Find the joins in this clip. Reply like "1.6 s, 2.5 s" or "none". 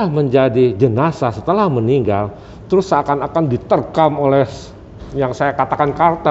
none